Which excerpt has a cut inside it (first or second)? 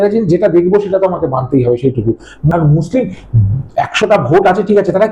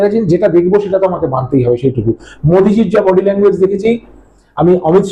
first